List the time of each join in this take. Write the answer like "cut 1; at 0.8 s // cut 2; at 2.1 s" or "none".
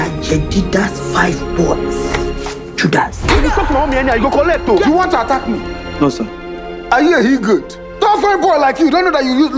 none